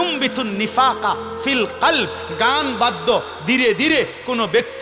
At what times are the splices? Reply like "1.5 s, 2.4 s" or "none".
none